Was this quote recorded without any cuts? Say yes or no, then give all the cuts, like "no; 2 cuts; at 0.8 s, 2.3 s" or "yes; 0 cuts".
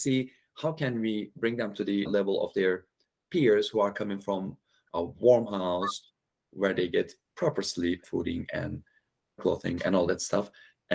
no; 3 cuts; at 1.7 s, 8.0 s, 9.4 s